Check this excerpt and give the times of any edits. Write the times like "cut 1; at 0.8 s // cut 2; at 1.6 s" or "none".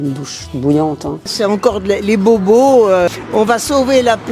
cut 1; at 1.3 s // cut 2; at 3.1 s